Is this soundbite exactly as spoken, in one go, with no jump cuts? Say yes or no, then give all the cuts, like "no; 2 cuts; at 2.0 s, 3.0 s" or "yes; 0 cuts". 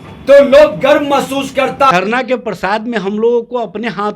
no; 1 cut; at 1.9 s